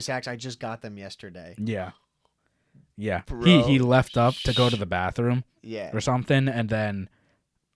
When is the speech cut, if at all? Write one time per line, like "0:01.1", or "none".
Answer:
none